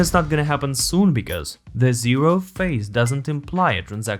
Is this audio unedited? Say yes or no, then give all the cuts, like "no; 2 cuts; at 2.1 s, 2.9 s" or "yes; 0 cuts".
yes; 0 cuts